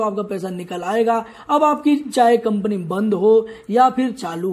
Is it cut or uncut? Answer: uncut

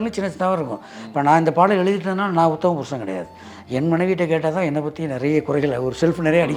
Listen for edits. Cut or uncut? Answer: uncut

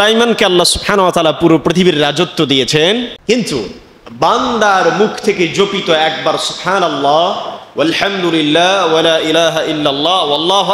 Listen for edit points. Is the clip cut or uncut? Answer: cut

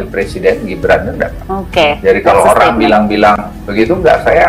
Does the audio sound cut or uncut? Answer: cut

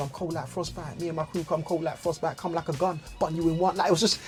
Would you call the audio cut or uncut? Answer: uncut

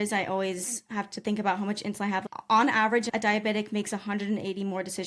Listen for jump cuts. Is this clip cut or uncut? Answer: cut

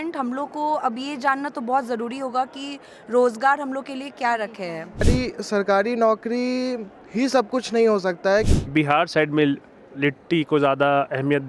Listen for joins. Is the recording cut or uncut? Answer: cut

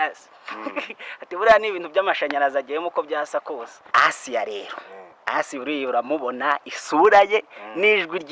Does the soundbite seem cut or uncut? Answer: cut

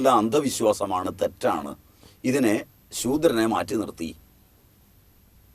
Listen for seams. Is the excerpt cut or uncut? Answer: uncut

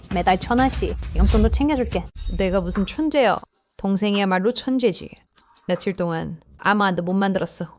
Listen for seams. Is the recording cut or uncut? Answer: cut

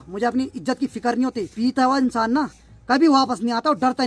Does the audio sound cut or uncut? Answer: cut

